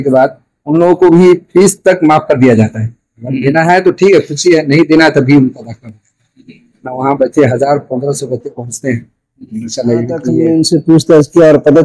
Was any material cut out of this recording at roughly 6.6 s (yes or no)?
no